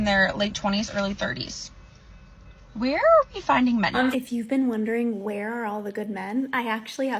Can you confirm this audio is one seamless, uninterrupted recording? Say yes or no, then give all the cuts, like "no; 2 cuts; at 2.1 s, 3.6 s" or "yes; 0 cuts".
no; 1 cut; at 4.1 s